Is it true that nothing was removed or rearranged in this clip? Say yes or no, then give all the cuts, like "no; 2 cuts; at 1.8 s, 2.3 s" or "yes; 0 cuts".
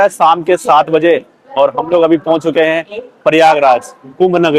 yes; 0 cuts